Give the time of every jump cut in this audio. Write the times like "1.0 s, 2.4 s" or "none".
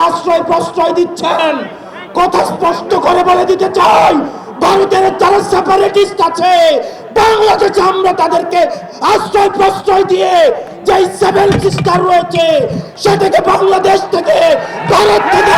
none